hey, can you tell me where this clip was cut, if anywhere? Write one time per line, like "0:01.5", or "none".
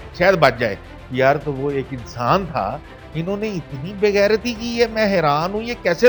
none